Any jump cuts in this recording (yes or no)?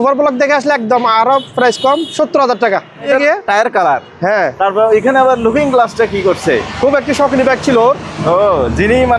yes